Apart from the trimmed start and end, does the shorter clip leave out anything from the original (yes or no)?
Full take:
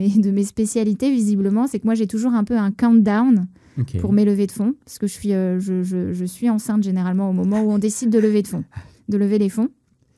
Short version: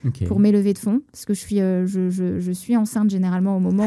no